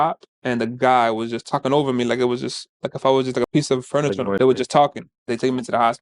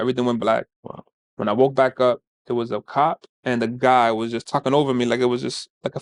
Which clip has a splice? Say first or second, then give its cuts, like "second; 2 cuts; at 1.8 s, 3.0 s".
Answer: first; 2 cuts; at 4.4 s, 5.2 s